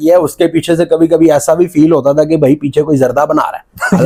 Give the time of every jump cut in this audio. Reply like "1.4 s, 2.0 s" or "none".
none